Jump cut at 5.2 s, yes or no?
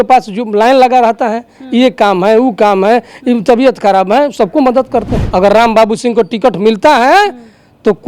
yes